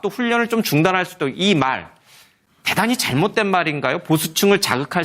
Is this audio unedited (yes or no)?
no